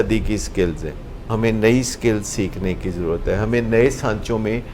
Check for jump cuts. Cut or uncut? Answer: cut